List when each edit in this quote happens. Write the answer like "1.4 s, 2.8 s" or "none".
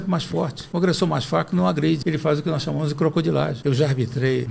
2.0 s, 3.6 s